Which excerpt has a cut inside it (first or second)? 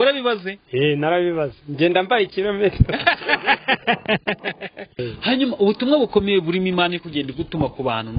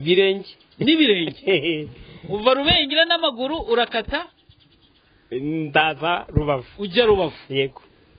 first